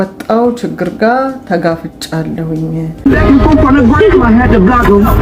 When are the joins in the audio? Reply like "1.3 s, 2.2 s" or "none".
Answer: 3.0 s

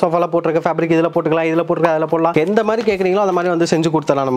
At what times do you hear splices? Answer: none

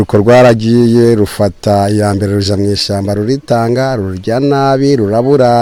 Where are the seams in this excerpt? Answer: none

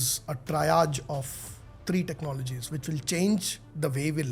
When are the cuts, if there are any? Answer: none

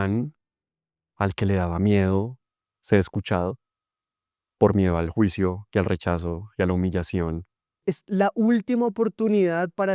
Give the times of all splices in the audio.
7.8 s

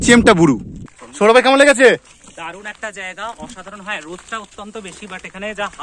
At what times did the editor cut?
1.3 s

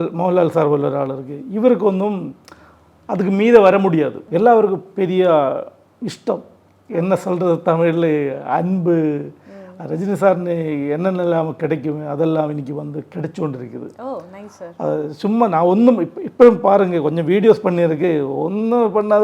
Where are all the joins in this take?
4.2 s

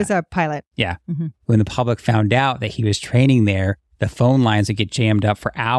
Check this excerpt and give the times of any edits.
1.3 s

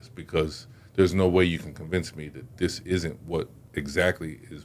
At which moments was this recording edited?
3.6 s

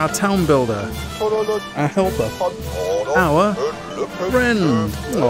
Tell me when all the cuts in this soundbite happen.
none

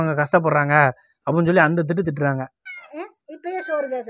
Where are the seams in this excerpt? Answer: 2.5 s

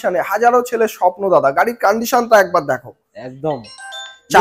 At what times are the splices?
none

